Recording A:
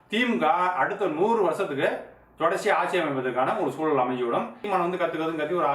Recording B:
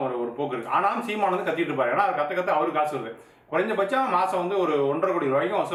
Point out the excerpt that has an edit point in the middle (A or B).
A